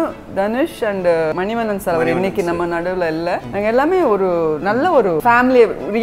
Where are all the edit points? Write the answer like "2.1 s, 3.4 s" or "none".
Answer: 1.3 s, 3.5 s, 5.2 s